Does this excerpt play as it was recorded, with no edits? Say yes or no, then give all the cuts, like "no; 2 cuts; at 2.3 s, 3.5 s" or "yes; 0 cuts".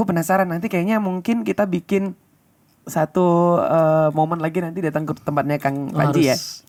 yes; 0 cuts